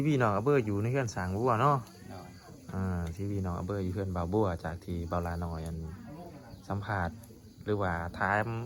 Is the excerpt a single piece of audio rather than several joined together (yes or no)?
yes